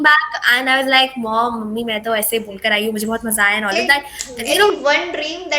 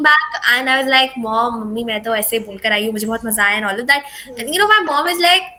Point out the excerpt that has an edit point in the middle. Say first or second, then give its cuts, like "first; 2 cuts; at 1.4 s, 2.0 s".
first; 1 cut; at 4.7 s